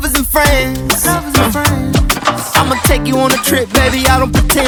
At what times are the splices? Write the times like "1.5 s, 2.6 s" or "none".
none